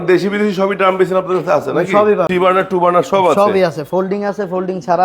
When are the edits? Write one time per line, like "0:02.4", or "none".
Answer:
0:02.3